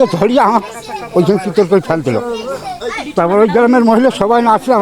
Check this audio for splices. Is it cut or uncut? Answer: uncut